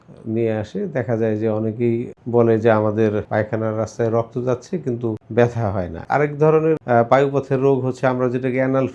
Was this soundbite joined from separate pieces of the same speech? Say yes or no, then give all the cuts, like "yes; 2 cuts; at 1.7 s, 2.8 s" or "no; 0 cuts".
yes; 5 cuts; at 2.2 s, 3.3 s, 5.2 s, 6.0 s, 6.8 s